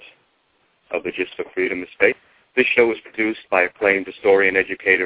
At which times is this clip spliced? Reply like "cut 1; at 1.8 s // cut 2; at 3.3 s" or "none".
cut 1; at 2.3 s